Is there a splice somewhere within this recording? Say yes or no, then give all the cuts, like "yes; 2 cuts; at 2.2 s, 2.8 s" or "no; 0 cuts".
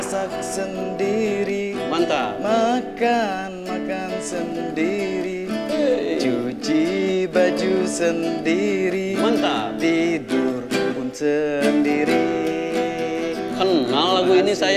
no; 0 cuts